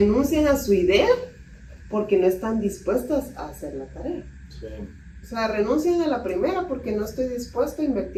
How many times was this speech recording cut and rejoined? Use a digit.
0